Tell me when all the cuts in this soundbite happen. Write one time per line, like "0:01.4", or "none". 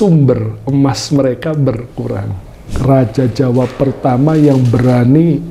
0:02.8